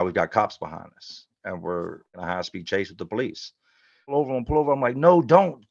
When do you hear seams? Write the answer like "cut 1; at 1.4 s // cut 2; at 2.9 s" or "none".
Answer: cut 1; at 2.2 s // cut 2; at 4.1 s